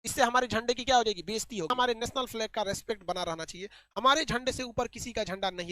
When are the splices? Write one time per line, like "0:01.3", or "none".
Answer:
0:01.7